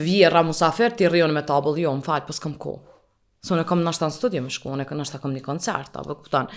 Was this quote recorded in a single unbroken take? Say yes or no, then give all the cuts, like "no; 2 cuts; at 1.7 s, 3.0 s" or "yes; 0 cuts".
yes; 0 cuts